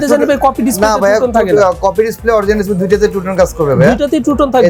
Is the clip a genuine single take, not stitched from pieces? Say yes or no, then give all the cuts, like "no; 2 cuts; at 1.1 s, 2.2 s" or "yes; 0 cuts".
yes; 0 cuts